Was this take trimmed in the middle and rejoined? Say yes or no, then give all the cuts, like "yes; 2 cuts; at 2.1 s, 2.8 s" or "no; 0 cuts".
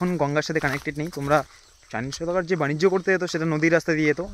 yes; 1 cut; at 1.6 s